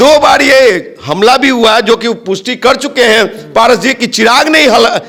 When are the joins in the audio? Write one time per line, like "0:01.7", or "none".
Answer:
none